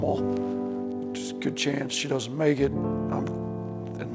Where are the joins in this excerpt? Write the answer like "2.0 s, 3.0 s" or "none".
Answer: none